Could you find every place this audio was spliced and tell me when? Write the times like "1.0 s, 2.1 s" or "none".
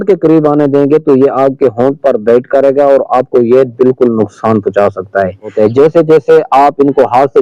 5.5 s